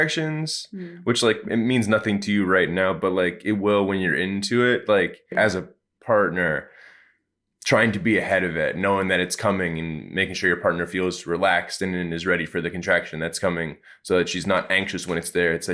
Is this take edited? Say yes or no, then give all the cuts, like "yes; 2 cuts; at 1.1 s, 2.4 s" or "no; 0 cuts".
yes; 1 cut; at 5.3 s